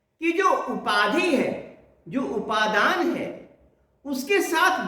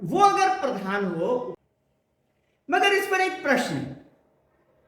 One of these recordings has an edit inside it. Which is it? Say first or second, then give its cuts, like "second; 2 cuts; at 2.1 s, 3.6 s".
second; 1 cut; at 1.5 s